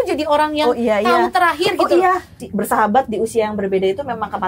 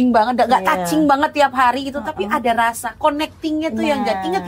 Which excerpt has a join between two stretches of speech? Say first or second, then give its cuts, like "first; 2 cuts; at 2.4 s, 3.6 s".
first; 1 cut; at 2.3 s